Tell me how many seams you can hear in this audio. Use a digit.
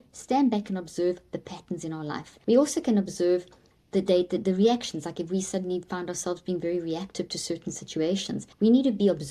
2